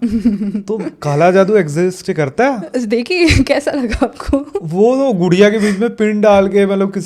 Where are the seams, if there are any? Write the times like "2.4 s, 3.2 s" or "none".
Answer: none